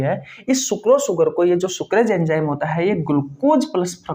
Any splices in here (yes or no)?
no